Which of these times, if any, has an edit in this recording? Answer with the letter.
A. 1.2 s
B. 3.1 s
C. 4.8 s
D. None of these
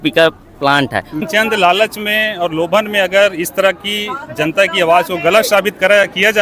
A